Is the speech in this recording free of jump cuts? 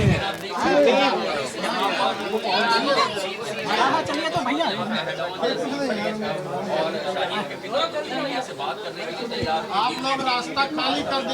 yes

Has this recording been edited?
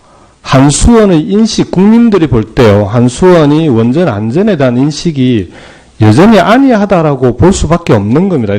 yes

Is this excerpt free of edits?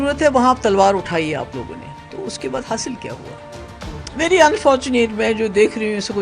yes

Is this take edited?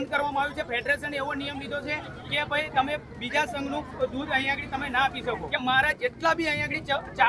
yes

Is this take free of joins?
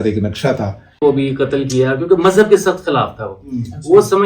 no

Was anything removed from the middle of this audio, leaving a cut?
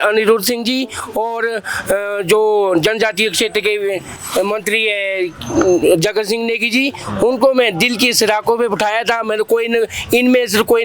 no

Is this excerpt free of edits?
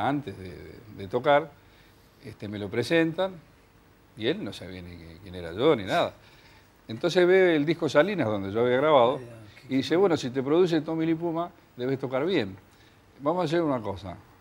no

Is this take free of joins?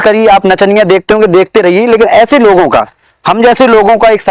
yes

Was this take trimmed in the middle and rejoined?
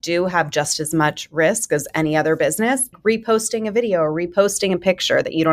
yes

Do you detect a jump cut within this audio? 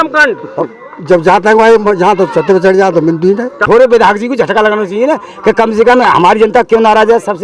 yes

